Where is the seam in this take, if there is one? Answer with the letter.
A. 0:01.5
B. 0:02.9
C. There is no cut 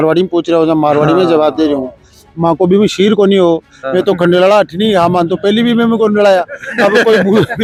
C